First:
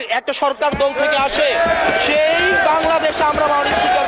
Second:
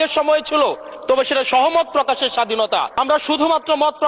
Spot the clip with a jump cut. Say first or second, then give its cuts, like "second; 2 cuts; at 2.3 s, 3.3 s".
second; 1 cut; at 2.9 s